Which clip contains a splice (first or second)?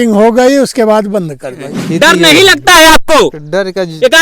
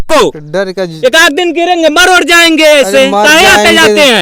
first